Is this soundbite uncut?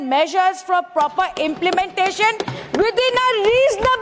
yes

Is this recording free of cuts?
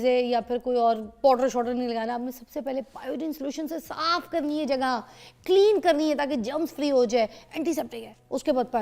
yes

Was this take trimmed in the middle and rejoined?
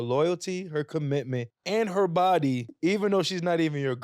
yes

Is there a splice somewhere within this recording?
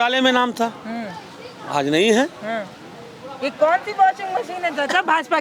no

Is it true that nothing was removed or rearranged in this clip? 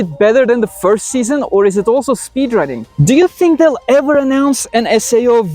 no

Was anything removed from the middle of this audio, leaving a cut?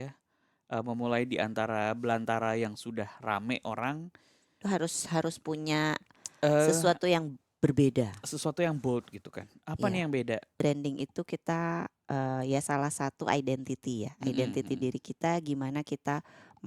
yes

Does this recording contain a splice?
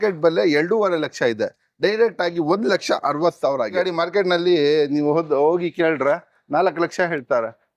yes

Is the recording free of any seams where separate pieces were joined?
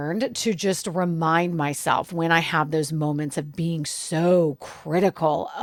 yes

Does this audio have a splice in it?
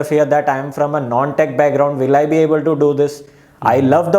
no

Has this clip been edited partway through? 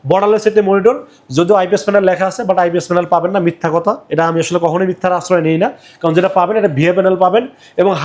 no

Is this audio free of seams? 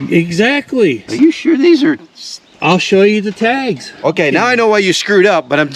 no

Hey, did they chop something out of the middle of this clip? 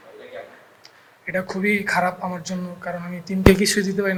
no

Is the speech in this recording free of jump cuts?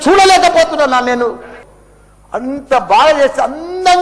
no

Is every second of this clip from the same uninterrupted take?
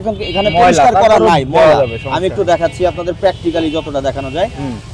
yes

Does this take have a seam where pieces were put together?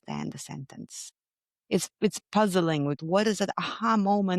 yes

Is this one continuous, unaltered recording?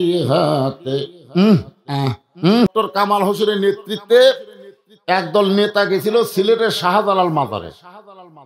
no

